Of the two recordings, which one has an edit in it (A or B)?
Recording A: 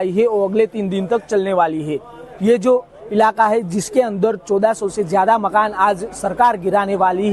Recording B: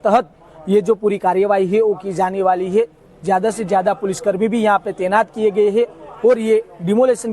B